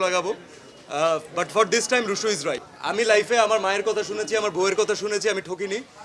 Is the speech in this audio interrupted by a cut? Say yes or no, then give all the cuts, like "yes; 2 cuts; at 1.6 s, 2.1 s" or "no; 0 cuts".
yes; 1 cut; at 2.7 s